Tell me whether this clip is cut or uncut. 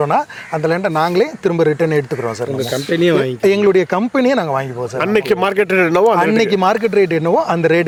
uncut